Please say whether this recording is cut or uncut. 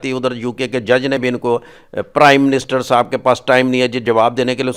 uncut